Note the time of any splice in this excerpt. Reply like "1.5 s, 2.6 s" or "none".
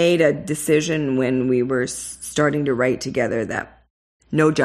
none